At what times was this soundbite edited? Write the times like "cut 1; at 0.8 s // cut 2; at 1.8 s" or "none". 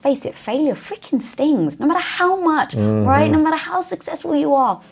none